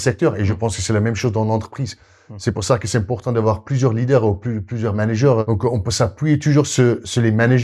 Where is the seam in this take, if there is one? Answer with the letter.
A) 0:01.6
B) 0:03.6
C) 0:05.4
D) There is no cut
C